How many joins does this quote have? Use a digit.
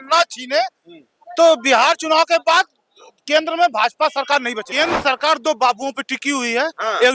1